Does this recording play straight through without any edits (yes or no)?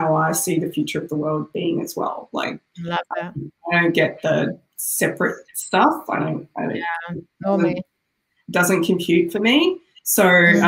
yes